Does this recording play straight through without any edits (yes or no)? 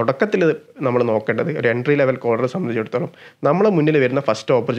yes